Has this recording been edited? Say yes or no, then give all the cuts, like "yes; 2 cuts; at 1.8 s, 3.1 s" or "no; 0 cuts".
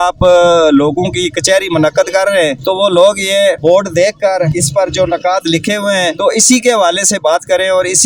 no; 0 cuts